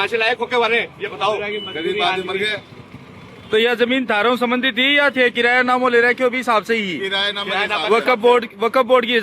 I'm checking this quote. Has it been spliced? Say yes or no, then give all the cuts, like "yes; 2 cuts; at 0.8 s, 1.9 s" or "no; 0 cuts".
no; 0 cuts